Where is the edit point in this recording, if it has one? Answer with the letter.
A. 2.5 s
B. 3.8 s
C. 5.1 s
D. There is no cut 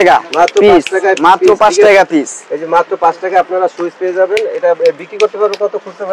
D